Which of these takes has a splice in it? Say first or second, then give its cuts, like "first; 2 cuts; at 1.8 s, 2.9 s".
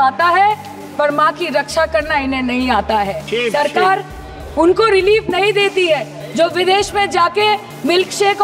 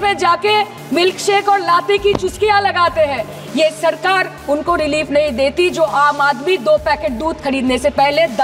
first; 1 cut; at 3.3 s